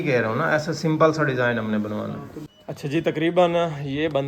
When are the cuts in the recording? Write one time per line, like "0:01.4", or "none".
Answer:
0:02.3